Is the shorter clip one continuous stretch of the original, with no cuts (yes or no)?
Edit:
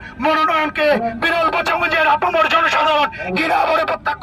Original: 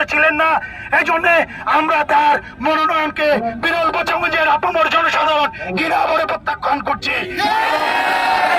yes